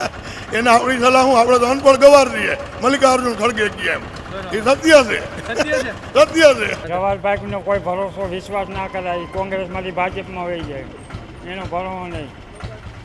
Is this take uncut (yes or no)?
no